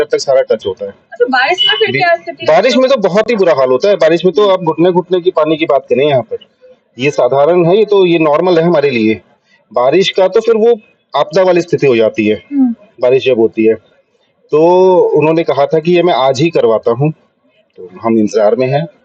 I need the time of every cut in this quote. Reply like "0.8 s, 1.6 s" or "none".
none